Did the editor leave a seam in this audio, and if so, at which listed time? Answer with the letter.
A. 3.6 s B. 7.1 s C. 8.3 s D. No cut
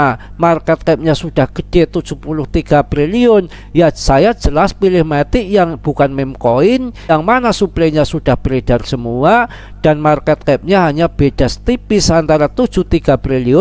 B